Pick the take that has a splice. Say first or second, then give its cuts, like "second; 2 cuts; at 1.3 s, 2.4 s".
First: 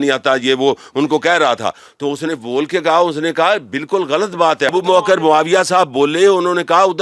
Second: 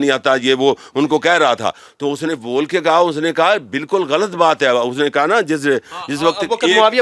first; 1 cut; at 4.7 s